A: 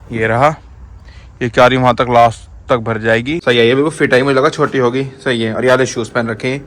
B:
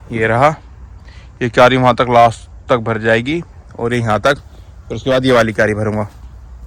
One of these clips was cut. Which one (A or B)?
A